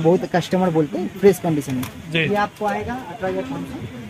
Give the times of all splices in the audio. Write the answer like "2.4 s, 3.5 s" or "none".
none